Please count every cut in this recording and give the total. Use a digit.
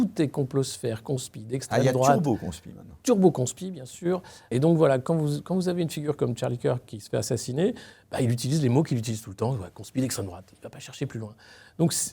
1